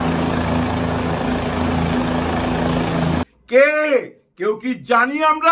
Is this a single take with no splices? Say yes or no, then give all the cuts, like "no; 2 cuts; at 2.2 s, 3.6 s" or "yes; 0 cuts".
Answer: yes; 0 cuts